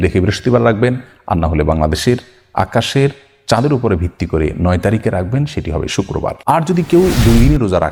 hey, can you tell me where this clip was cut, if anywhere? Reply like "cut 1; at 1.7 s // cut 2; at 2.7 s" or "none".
cut 1; at 6.4 s